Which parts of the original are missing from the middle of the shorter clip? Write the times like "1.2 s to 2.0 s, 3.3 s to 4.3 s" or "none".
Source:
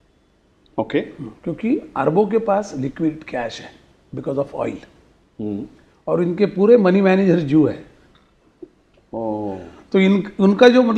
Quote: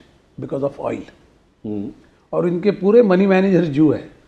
none